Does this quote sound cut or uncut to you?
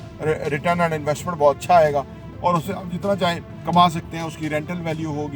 cut